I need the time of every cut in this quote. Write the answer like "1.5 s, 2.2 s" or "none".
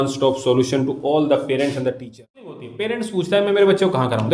2.7 s